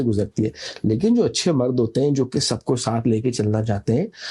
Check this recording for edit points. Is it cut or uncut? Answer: uncut